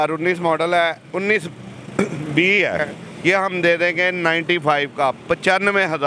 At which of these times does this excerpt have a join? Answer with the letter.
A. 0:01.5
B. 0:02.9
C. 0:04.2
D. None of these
B